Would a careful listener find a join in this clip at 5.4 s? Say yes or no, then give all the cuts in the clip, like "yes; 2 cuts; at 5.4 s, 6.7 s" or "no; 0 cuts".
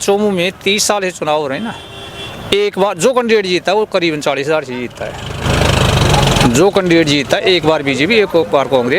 no; 0 cuts